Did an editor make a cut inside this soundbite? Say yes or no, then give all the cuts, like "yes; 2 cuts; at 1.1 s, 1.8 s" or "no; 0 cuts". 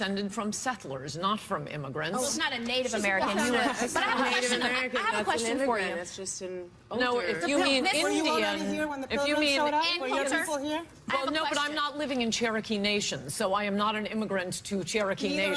no; 0 cuts